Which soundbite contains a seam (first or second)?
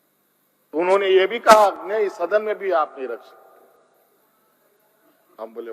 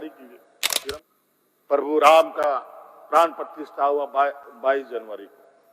second